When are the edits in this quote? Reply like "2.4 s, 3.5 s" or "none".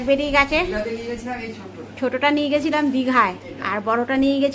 none